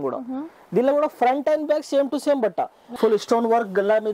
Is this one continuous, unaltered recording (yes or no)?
no